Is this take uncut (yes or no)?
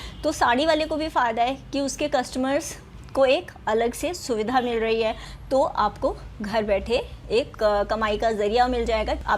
no